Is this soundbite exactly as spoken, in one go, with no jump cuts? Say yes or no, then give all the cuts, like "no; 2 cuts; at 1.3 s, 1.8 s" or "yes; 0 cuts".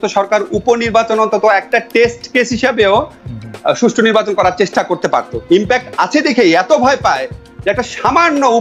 yes; 0 cuts